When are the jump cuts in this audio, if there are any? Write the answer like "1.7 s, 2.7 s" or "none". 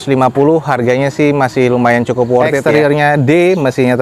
2.6 s